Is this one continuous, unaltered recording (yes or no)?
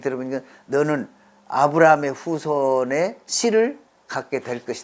no